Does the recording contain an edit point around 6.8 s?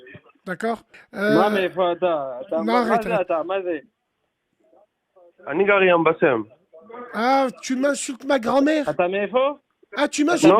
no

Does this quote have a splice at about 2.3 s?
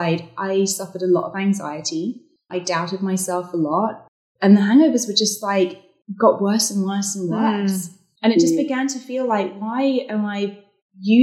yes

